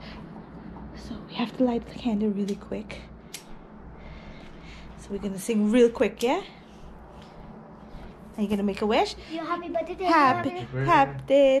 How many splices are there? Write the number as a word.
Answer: zero